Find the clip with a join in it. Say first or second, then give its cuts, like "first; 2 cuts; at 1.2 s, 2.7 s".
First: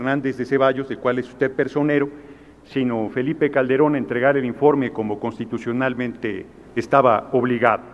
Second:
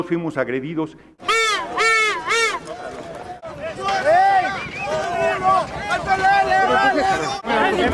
first; 1 cut; at 3.2 s